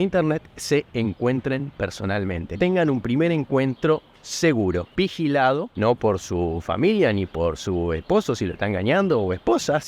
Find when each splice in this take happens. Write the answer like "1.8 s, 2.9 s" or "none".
2.6 s, 4.9 s, 5.7 s